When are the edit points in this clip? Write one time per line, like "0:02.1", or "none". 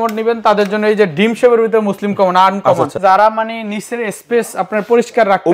0:02.9